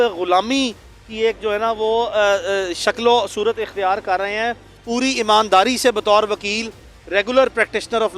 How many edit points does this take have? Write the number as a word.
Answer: one